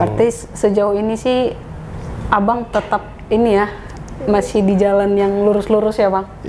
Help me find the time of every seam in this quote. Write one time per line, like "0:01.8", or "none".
none